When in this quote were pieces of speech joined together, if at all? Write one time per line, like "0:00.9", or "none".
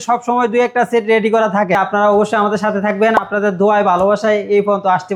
0:01.8